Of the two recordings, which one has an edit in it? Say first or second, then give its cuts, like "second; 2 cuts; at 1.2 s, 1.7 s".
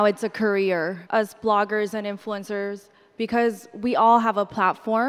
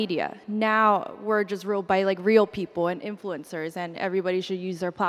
first; 1 cut; at 1.0 s